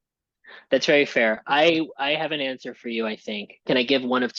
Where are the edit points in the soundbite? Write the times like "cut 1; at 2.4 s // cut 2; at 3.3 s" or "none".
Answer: none